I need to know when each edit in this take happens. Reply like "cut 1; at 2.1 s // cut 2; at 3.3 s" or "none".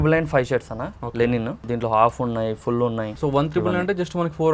cut 1; at 1.6 s // cut 2; at 3.1 s